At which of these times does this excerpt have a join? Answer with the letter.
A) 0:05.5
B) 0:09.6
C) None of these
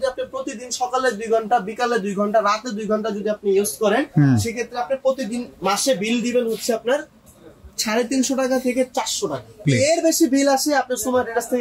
B